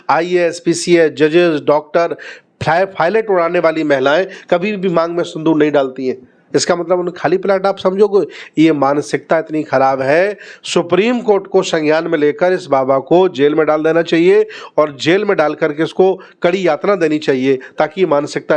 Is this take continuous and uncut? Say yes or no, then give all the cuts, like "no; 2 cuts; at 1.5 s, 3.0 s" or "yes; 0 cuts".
yes; 0 cuts